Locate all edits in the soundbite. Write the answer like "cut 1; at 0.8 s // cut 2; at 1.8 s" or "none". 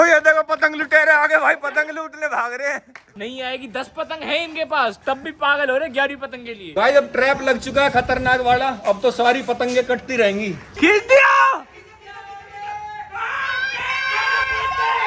cut 1; at 6.6 s // cut 2; at 10.6 s